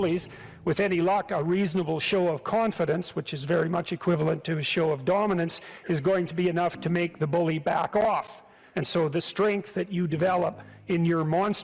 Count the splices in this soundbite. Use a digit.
2